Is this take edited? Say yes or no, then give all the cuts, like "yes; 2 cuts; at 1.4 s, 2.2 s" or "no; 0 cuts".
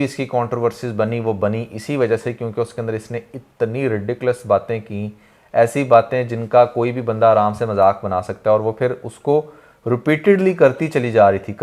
no; 0 cuts